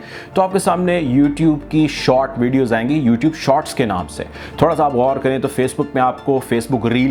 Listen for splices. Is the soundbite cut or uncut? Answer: uncut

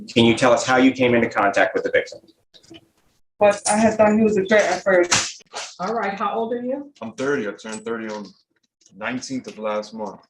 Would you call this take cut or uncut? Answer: cut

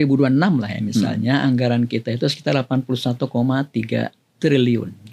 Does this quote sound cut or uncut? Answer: uncut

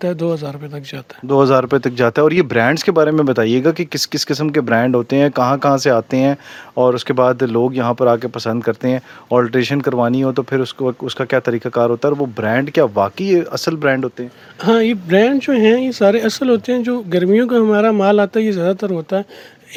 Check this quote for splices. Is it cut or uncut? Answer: uncut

